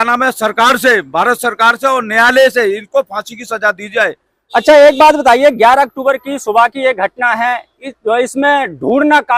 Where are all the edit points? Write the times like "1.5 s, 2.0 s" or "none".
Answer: none